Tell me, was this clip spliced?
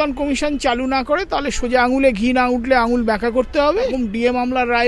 yes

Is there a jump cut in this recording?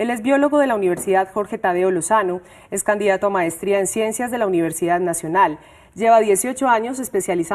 yes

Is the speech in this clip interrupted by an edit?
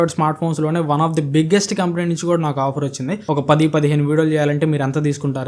no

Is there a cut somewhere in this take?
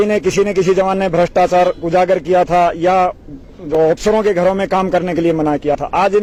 no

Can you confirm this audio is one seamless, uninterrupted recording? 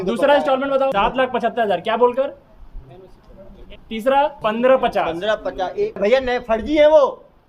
no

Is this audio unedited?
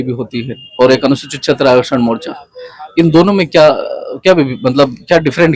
yes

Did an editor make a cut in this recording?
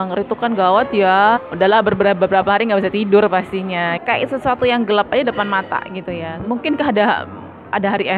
yes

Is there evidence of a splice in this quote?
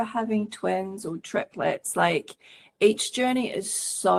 no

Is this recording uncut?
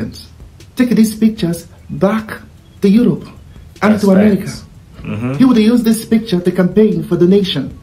yes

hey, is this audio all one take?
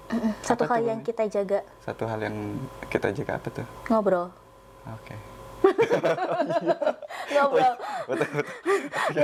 yes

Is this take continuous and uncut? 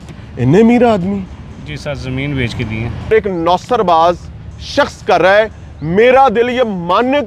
no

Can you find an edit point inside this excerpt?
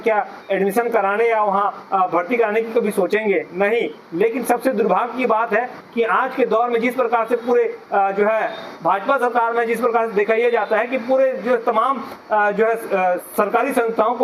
no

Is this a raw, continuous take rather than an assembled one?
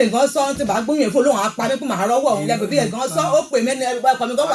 yes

